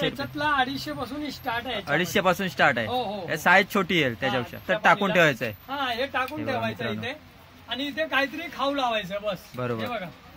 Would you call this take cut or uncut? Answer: cut